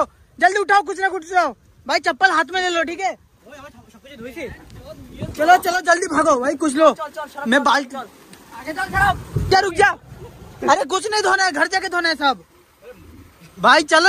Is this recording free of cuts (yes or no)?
yes